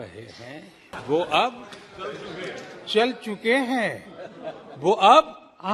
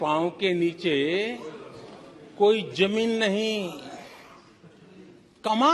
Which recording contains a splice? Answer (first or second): first